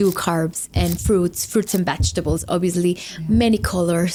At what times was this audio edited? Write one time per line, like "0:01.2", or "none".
none